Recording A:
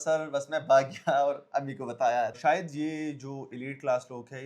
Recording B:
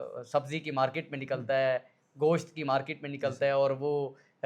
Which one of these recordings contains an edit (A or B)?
A